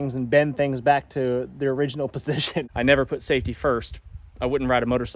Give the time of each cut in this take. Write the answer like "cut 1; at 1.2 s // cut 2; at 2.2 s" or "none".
cut 1; at 2.7 s